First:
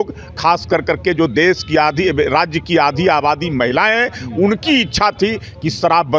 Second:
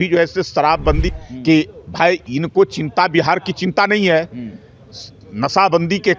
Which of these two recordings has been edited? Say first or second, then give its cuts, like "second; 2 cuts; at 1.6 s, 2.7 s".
second; 1 cut; at 1.1 s